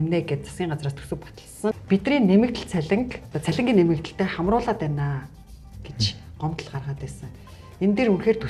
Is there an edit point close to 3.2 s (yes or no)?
yes